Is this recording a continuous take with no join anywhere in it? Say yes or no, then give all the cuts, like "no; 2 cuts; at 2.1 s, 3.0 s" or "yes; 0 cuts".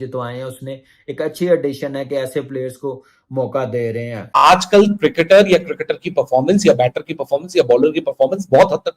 no; 1 cut; at 4.2 s